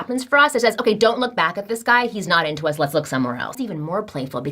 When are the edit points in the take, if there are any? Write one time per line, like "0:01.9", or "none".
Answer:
0:03.5